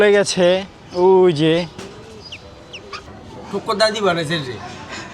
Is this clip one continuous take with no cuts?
no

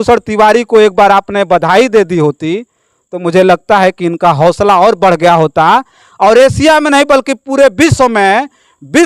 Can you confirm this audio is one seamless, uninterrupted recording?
yes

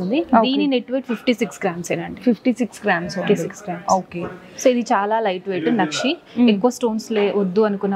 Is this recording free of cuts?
yes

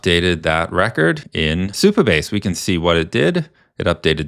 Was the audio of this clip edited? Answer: yes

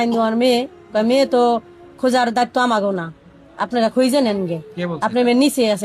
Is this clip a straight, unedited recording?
yes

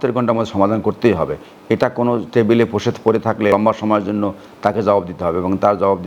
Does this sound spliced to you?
yes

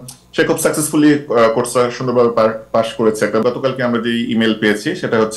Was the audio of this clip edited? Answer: yes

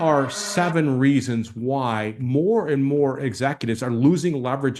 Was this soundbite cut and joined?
no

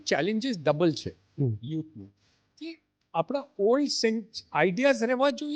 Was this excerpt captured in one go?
yes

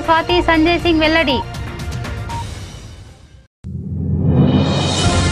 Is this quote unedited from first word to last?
no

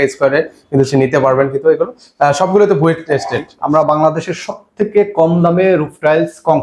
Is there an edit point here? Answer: yes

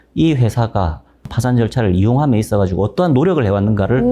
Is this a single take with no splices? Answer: no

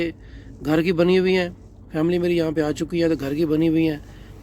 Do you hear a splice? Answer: no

